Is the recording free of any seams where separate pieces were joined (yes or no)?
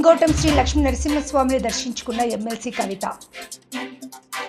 yes